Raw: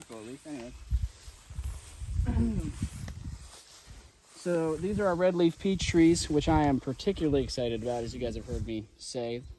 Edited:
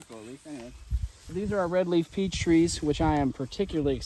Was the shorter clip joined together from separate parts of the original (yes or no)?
yes